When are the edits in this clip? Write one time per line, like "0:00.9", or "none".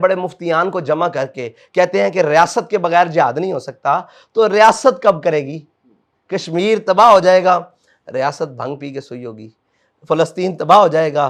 none